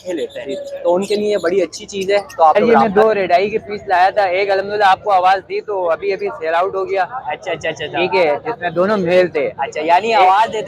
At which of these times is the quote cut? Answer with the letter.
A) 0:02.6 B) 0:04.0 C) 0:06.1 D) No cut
A